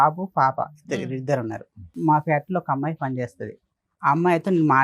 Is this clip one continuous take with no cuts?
no; 1 cut; at 2.0 s

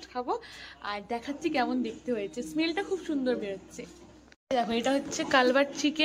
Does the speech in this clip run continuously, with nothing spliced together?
yes; 0 cuts

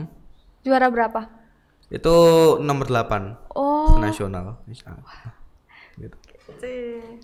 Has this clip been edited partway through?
no; 0 cuts

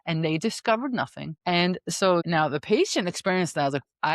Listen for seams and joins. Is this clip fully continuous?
no; 2 cuts; at 1.2 s, 2.2 s

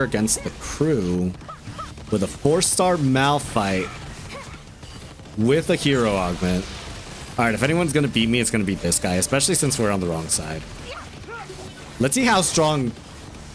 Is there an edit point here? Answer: no; 0 cuts

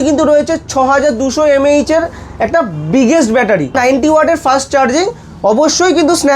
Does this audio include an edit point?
yes; 1 cut; at 3.8 s

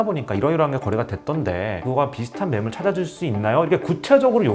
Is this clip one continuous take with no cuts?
no; 1 cut; at 1.7 s

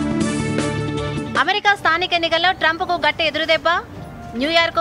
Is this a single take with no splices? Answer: no; 1 cut; at 1.2 s

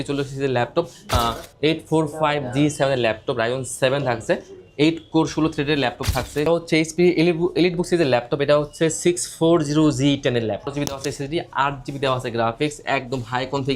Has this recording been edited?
yes; 3 cuts; at 1.1 s, 6.5 s, 10.7 s

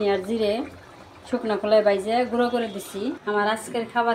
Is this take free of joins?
no; 1 cut; at 3.2 s

